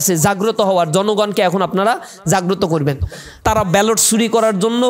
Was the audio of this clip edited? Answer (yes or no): yes